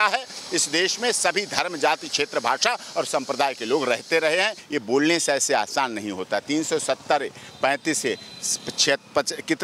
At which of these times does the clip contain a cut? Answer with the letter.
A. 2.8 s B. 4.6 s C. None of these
B